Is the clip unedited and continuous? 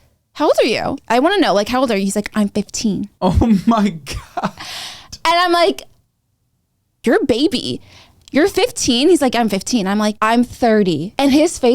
no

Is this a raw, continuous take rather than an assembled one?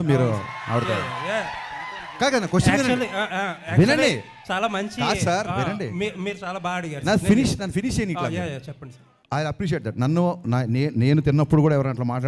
no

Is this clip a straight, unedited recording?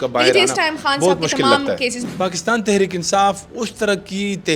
no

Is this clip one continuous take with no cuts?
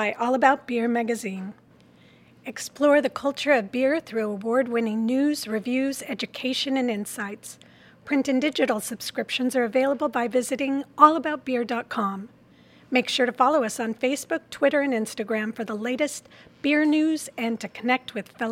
yes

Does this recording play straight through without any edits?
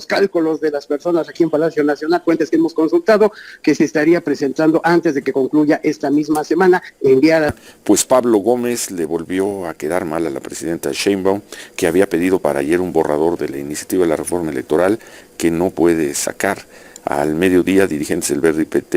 no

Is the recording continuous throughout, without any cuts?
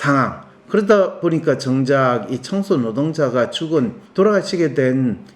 no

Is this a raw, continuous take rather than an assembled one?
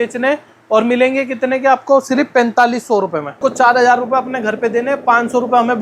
no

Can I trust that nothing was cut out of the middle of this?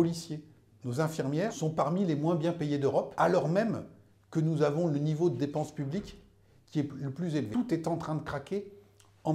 no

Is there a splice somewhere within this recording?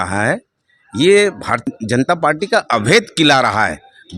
yes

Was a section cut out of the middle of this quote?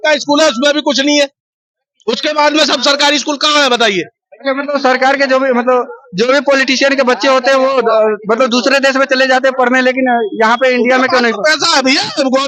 no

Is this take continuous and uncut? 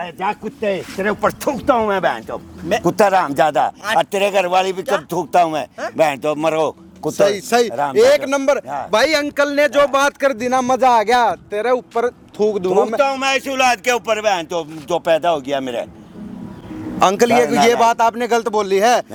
yes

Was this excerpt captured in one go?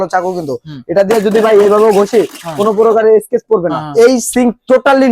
no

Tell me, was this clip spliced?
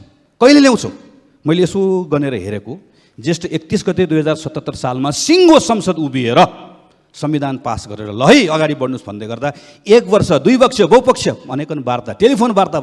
no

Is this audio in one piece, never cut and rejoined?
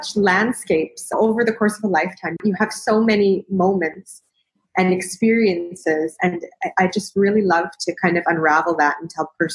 yes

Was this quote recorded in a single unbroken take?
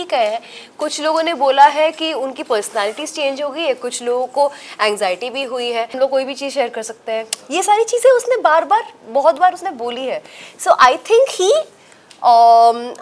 no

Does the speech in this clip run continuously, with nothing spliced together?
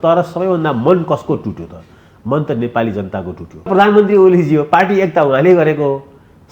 no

